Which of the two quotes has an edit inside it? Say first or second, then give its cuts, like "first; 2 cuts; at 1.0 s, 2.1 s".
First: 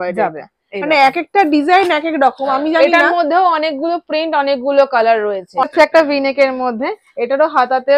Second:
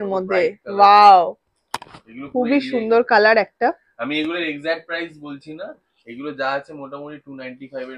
first; 1 cut; at 5.7 s